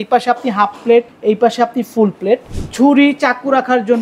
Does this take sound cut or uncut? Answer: cut